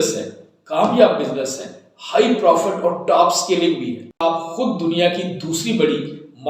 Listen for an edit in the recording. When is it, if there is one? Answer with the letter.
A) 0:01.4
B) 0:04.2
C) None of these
B